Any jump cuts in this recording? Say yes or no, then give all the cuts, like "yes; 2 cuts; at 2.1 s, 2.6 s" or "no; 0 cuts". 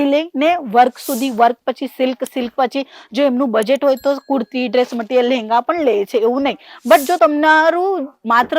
no; 0 cuts